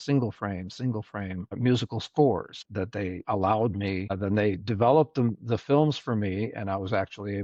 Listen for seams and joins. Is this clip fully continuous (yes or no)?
no